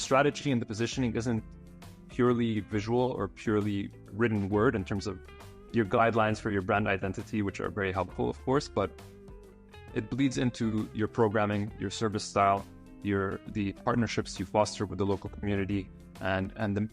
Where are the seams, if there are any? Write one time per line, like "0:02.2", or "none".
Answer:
none